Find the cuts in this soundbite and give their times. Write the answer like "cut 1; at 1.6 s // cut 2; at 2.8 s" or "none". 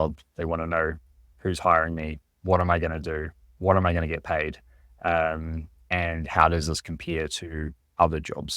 none